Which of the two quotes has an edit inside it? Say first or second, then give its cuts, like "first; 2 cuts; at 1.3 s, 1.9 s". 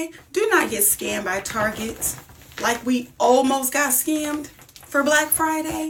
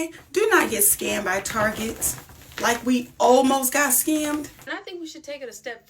second; 1 cut; at 4.7 s